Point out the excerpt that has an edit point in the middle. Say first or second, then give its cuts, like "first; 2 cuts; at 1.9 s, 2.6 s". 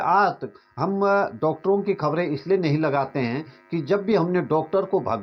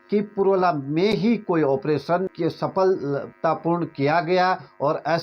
second; 1 cut; at 2.3 s